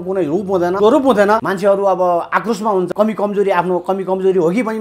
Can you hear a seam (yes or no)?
yes